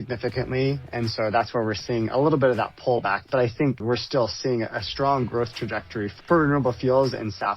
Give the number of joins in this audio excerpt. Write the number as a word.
one